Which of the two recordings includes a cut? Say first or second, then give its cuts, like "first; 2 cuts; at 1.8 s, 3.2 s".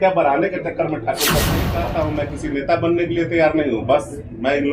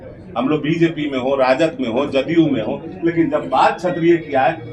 first; 1 cut; at 1.7 s